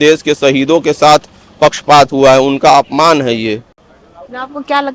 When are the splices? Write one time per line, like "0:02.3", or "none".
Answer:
none